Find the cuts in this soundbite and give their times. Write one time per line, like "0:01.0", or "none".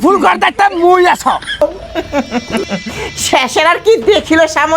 0:01.6